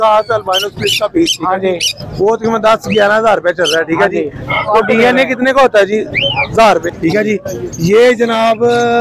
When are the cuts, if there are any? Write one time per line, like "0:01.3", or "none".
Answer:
0:06.9